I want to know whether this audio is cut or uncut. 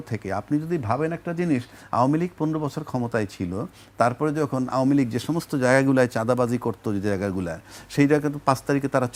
uncut